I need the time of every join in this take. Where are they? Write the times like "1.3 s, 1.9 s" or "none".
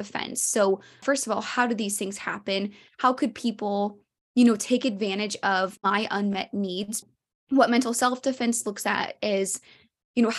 1.0 s, 5.7 s, 7.1 s